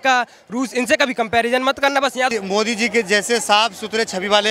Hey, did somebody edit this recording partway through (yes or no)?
yes